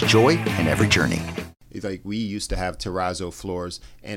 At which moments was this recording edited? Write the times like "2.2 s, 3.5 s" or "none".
1.4 s